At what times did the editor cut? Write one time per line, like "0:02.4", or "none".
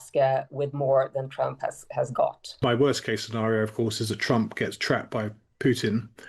0:02.5